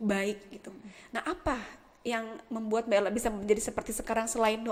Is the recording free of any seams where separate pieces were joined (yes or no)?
yes